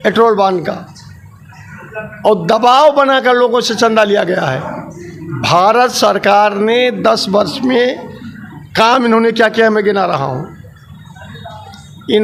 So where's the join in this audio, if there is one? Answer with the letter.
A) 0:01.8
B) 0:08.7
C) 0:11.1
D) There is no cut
D